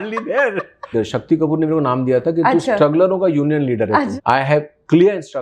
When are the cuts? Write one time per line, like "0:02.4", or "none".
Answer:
0:00.9
0:04.1